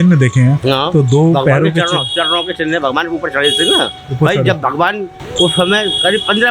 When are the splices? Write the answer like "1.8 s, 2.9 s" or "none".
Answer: 5.2 s